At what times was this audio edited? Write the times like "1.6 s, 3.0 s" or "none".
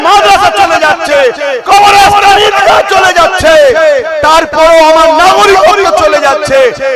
none